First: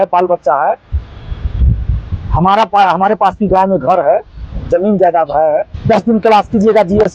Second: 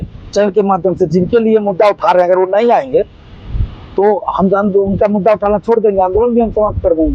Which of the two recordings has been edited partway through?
first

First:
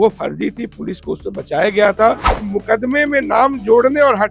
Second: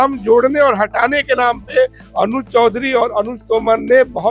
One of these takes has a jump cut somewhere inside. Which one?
first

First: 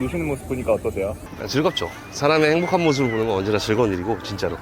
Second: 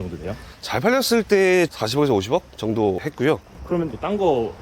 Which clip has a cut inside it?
second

